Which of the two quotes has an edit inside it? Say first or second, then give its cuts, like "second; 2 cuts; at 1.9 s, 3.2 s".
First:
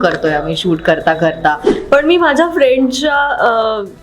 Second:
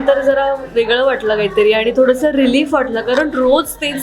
first; 1 cut; at 1.7 s